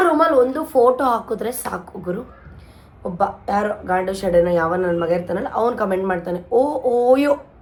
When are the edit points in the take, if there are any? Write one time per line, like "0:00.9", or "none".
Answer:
none